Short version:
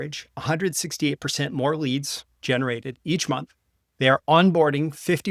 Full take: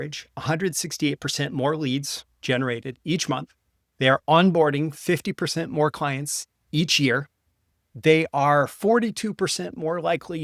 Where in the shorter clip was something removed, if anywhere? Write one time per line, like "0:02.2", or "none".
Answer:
none